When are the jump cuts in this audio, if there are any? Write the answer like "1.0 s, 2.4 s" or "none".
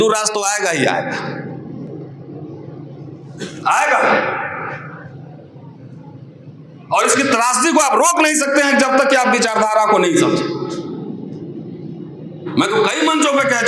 none